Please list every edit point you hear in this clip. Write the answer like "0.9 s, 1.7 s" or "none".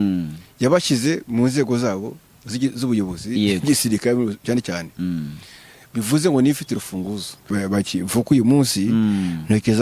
7.5 s